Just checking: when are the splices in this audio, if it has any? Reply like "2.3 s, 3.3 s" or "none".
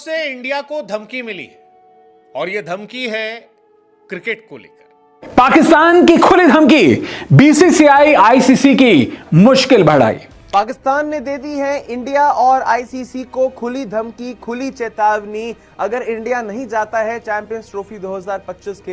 5.3 s, 10.5 s